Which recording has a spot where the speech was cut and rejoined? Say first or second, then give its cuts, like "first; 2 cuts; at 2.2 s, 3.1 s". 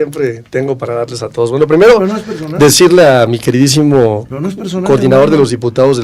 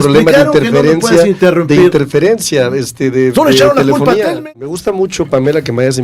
second; 1 cut; at 4.8 s